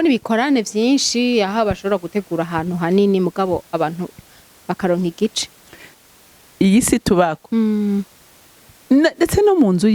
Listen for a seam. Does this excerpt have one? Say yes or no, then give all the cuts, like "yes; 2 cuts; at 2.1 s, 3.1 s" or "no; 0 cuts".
yes; 1 cut; at 5.9 s